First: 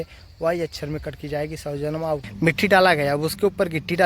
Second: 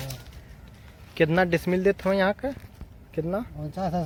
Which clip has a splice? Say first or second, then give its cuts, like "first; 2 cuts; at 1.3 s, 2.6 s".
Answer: first; 1 cut; at 2.3 s